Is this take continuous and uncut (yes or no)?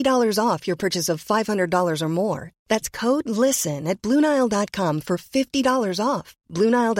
yes